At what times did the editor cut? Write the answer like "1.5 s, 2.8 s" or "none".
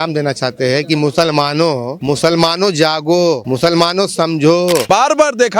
1.9 s, 3.4 s, 4.8 s